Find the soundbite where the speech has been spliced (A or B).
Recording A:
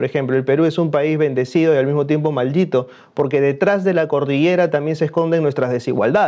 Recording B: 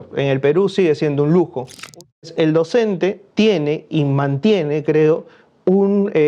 B